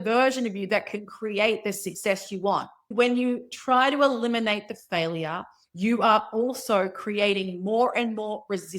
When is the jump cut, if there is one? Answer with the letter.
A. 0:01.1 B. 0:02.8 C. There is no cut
B